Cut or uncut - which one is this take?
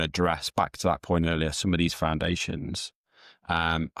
uncut